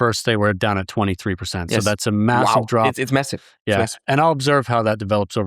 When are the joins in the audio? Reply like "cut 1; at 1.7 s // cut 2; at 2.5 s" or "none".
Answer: none